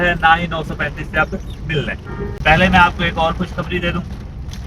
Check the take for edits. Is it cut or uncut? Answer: cut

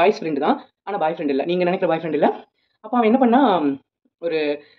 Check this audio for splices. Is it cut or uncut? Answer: uncut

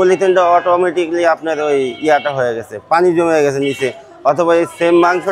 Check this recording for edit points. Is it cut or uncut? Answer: uncut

